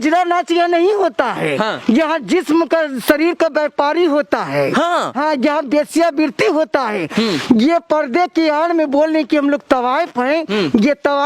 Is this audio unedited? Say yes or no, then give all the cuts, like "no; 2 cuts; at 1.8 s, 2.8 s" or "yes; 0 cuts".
yes; 0 cuts